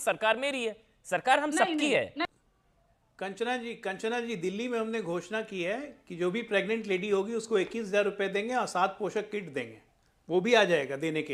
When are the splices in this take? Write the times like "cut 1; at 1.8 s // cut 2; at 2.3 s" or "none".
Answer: cut 1; at 2.2 s